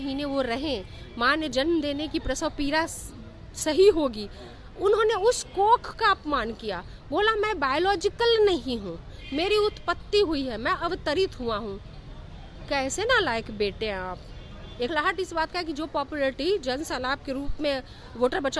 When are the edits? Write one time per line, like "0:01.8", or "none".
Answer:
0:14.9